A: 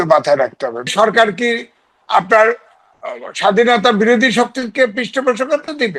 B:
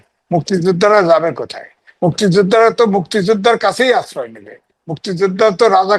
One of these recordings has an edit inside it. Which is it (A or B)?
A